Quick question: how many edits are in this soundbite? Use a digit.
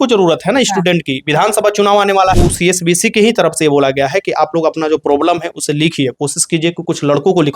1